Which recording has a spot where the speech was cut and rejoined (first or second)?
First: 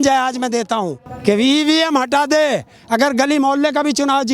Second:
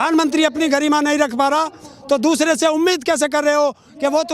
first